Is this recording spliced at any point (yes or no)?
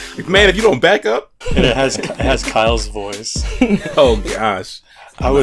yes